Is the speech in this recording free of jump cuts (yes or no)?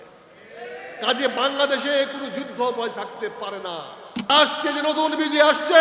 no